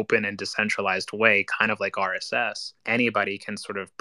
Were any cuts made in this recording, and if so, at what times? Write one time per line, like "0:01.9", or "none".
0:02.7